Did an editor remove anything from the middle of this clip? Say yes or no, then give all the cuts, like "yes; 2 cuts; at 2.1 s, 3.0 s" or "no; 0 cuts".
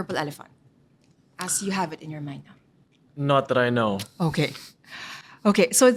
no; 0 cuts